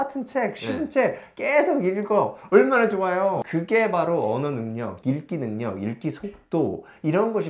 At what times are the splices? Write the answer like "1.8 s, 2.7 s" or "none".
3.4 s